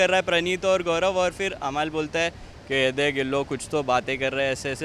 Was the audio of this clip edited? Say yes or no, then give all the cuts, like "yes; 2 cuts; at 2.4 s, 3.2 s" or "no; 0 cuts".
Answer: no; 0 cuts